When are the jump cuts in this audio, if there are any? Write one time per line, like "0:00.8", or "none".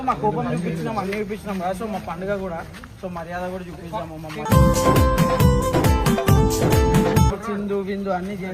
0:07.3